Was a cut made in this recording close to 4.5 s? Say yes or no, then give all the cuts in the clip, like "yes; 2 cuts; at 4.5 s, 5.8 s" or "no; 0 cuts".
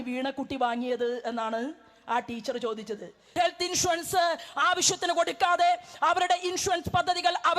no; 1 cut; at 3.3 s